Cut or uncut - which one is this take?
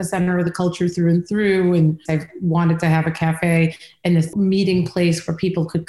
cut